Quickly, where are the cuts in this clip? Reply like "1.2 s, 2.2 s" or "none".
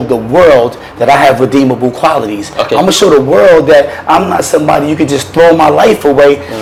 none